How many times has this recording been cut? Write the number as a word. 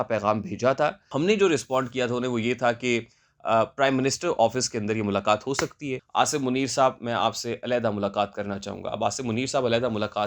two